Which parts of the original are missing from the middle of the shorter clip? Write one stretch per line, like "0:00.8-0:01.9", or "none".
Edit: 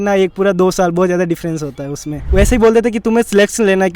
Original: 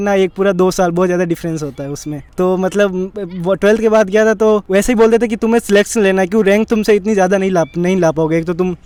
0:02.3-0:04.6